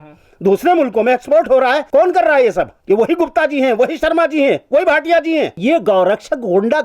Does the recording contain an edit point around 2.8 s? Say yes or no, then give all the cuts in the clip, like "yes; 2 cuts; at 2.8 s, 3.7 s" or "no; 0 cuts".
yes; 3 cuts; at 1.8 s, 2.8 s, 5.5 s